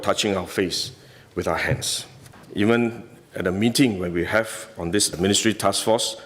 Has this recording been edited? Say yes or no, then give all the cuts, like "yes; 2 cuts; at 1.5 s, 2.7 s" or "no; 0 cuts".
yes; 1 cut; at 2.4 s